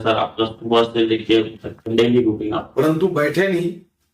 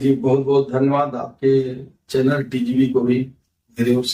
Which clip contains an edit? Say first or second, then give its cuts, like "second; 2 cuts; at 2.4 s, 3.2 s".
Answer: first; 1 cut; at 2.7 s